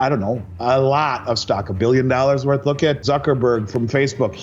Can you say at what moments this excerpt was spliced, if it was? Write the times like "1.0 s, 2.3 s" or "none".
3.0 s